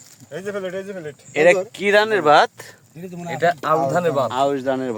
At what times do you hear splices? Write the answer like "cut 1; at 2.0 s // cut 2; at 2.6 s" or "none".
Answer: none